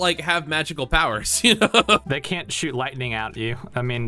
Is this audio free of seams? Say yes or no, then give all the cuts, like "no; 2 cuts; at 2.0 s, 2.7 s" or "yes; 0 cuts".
yes; 0 cuts